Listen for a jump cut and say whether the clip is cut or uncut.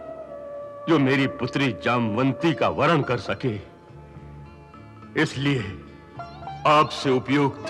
uncut